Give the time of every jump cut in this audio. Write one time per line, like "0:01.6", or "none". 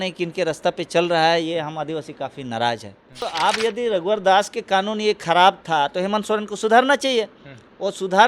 0:03.3